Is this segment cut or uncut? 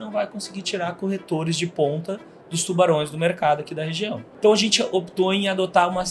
cut